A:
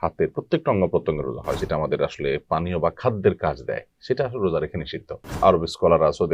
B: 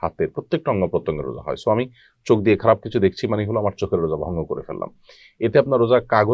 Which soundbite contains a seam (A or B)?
A